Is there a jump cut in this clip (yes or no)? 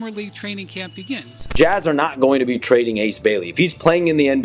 yes